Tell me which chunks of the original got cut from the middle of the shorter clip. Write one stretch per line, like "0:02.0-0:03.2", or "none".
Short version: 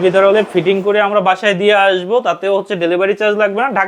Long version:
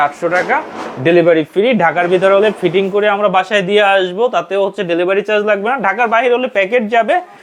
none